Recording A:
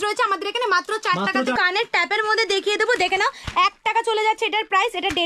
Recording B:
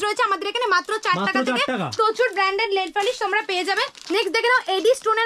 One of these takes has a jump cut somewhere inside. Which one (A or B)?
A